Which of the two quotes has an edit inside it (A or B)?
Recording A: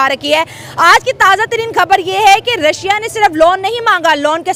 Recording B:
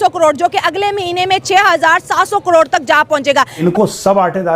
B